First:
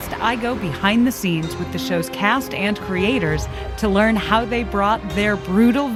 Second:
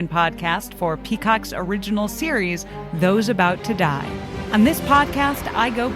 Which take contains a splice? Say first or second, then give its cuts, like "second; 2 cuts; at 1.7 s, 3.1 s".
second; 1 cut; at 4.4 s